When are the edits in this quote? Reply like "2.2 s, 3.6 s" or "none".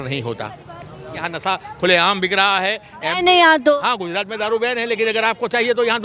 1.3 s